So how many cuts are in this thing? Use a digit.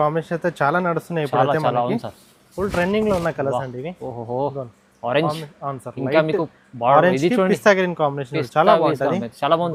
0